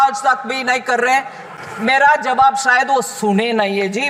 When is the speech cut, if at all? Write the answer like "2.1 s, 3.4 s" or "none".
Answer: none